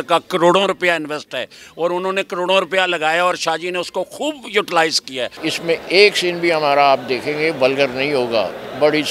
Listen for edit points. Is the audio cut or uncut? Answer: cut